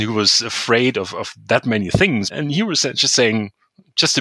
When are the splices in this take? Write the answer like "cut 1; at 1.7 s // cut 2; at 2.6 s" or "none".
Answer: cut 1; at 2.3 s